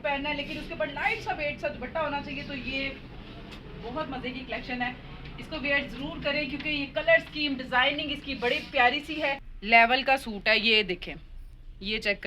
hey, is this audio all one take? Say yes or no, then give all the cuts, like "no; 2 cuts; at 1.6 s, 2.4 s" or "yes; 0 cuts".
no; 1 cut; at 9.5 s